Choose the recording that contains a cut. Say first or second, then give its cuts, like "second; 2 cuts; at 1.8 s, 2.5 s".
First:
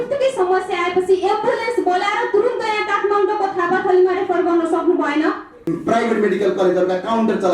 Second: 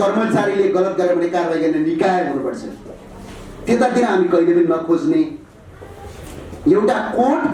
first; 1 cut; at 5.5 s